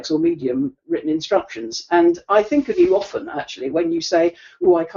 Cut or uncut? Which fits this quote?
uncut